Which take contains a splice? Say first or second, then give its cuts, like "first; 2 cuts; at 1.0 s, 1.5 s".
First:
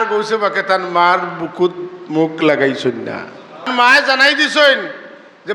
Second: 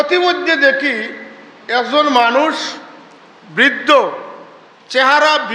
first; 1 cut; at 3.7 s